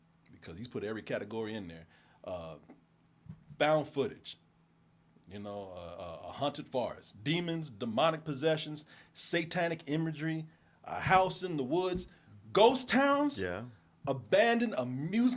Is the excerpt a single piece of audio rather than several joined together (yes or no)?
yes